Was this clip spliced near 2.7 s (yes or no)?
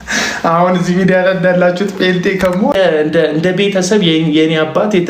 yes